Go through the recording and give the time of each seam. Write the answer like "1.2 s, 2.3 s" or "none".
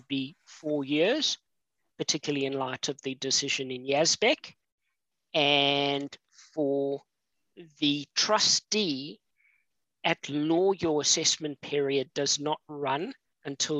none